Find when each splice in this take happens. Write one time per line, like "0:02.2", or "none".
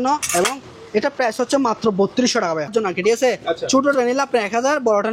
0:02.7